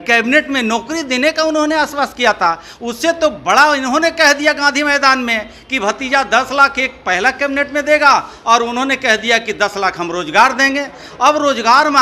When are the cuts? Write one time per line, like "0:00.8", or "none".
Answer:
none